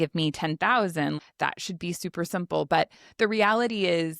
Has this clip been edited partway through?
yes; 1 cut; at 1.2 s

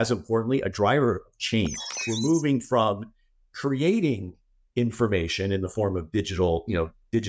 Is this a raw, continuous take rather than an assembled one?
no; 1 cut; at 2.0 s

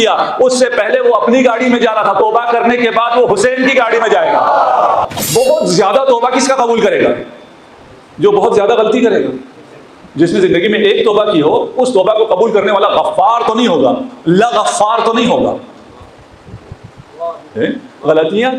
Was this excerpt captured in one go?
no; 1 cut; at 5.2 s

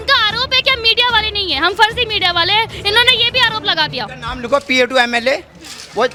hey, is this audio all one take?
yes; 0 cuts

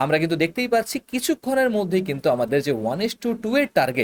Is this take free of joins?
yes; 0 cuts

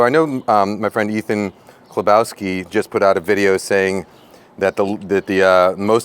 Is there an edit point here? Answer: no; 0 cuts

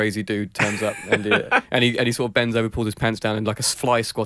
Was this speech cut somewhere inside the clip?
no; 0 cuts

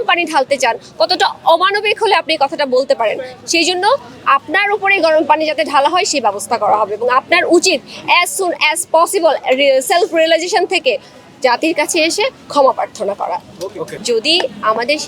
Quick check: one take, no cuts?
no; 1 cut; at 13.9 s

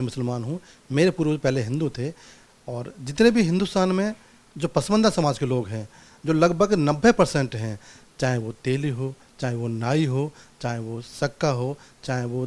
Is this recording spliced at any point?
no; 0 cuts

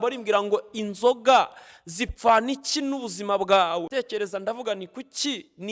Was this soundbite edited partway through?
yes; 1 cut; at 3.9 s

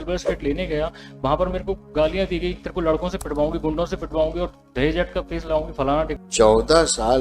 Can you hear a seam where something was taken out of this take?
yes; 1 cut; at 6.1 s

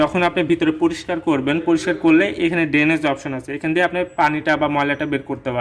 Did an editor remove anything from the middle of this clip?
no; 0 cuts

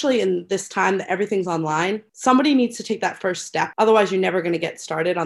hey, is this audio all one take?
no; 1 cut; at 3.7 s

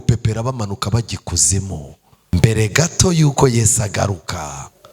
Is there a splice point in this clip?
yes; 1 cut; at 2.1 s

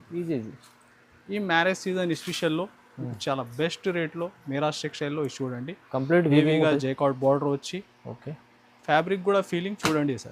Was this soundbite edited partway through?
no; 0 cuts

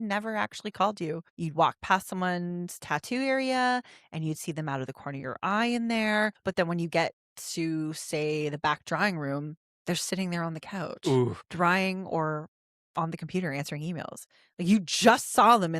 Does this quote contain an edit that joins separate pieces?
yes; 3 cuts; at 1.3 s, 6.4 s, 11.4 s

